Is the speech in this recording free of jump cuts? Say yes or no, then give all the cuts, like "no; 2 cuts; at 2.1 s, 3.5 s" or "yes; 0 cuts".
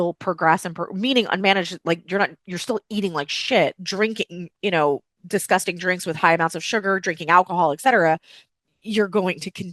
no; 1 cut; at 3.8 s